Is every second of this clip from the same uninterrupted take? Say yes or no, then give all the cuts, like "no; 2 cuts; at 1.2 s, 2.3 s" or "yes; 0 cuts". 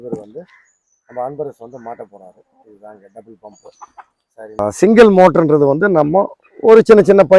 no; 1 cut; at 4.6 s